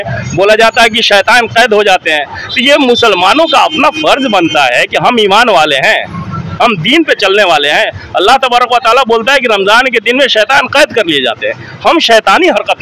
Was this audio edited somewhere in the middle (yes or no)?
no